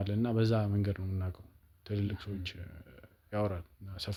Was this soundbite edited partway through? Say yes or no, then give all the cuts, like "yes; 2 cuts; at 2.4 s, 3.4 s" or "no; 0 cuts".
no; 0 cuts